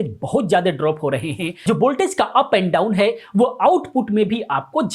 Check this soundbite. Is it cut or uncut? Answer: cut